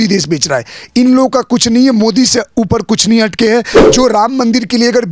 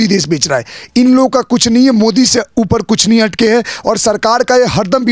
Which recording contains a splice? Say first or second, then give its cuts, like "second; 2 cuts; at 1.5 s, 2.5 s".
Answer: first; 1 cut; at 3.7 s